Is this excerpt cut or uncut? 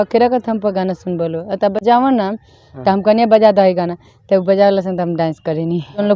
uncut